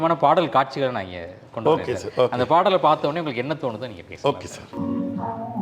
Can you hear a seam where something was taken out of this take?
no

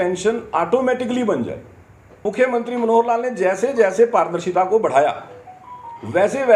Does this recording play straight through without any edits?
no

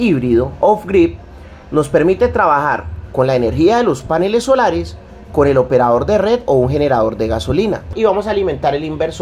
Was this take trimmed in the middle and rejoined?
yes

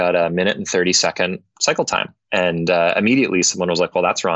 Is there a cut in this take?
yes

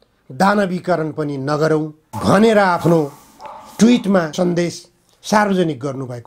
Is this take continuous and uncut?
yes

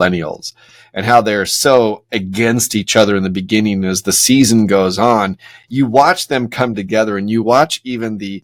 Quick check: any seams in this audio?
no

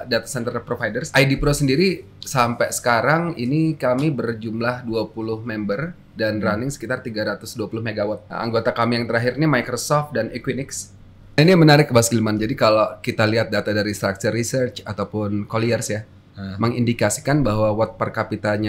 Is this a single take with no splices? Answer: no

